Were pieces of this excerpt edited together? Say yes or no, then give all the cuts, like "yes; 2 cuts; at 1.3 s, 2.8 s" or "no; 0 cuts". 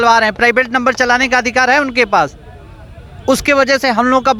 no; 0 cuts